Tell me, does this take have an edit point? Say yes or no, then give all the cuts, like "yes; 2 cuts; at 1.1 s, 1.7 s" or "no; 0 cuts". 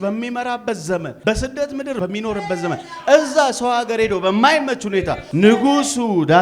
yes; 3 cuts; at 1.1 s, 2.0 s, 5.2 s